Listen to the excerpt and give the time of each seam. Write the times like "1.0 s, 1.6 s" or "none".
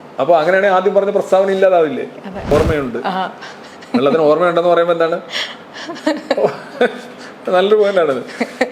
2.5 s

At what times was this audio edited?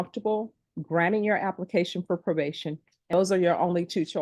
3.1 s

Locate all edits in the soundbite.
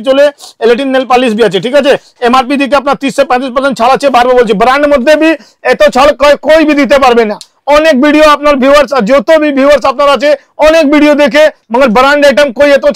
none

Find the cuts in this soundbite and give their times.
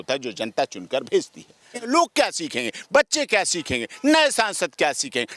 1.8 s

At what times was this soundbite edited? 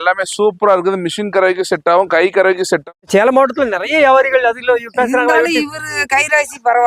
2.8 s

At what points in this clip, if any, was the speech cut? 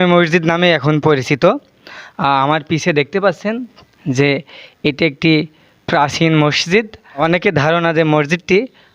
7.2 s

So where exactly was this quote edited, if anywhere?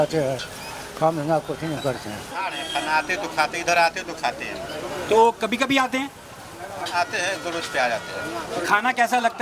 2.3 s

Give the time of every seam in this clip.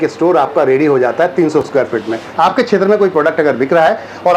2.2 s

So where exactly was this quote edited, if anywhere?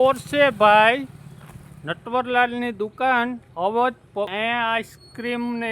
4.3 s

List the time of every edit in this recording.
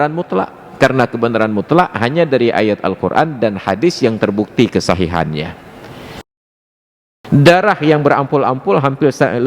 6.5 s

